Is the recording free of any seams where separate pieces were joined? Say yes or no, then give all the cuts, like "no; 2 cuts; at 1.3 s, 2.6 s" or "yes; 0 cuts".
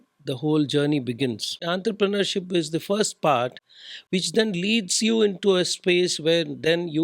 no; 1 cut; at 1.6 s